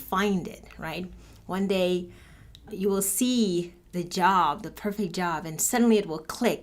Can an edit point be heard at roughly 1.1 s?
no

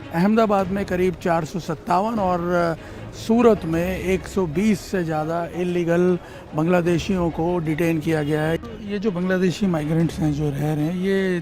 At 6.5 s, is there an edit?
no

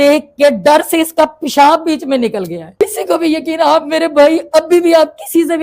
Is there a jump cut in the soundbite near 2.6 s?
yes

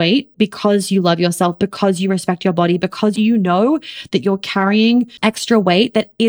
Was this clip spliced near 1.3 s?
no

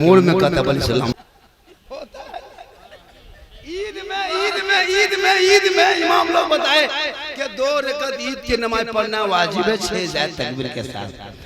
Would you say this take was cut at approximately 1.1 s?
yes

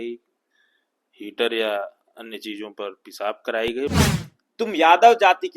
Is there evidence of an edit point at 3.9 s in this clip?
yes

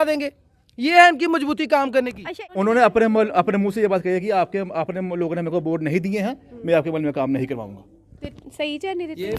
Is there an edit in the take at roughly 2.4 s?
yes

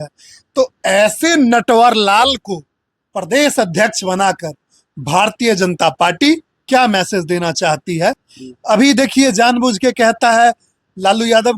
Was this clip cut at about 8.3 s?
yes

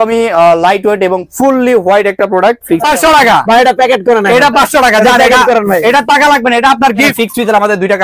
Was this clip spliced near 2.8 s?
yes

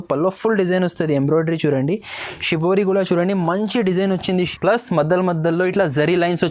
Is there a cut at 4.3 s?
yes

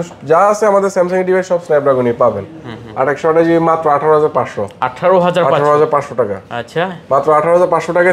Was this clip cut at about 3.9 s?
no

